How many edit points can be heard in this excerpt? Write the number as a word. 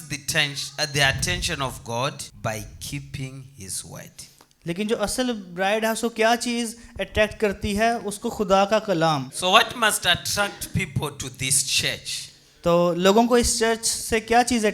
two